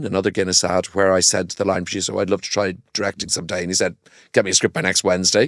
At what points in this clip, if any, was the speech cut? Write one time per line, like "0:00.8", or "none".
none